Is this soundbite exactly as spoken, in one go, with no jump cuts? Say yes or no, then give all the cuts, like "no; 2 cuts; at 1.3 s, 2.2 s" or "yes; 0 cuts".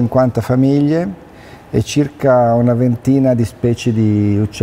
yes; 0 cuts